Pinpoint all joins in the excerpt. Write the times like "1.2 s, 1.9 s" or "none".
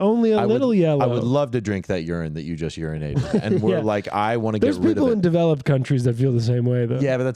none